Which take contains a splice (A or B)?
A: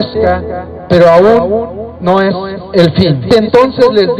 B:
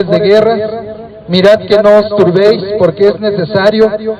A